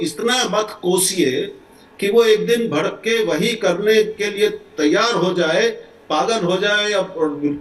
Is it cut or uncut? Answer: uncut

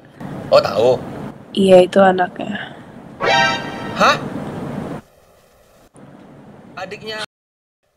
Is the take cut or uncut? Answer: uncut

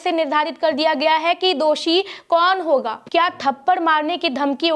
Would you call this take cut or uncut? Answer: cut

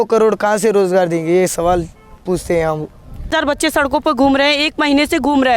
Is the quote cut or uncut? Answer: cut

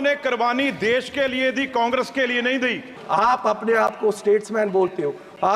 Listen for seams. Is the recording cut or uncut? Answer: cut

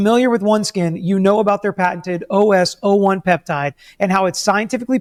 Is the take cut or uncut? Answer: uncut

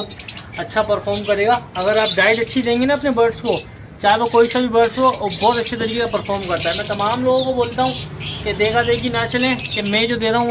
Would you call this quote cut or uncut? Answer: uncut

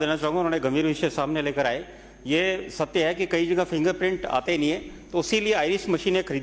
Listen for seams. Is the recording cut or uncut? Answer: uncut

